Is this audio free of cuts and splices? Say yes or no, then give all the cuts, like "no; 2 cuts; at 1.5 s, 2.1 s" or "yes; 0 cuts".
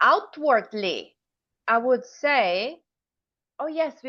yes; 0 cuts